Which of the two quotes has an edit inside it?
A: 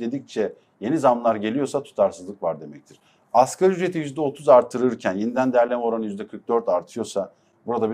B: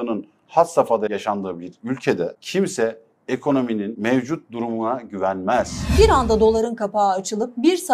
B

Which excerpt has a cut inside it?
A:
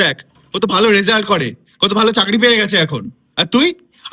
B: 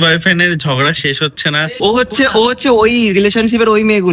B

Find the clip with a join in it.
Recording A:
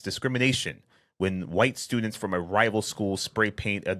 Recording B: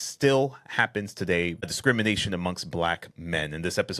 B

